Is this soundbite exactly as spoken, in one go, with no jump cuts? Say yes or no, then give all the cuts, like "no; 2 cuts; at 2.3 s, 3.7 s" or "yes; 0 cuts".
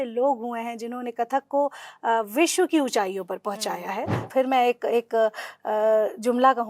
no; 1 cut; at 4.2 s